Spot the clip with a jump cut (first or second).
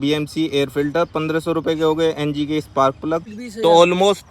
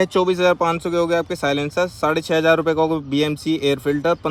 first